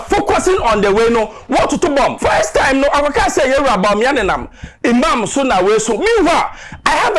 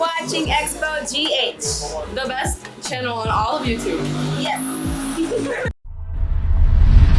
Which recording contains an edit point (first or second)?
first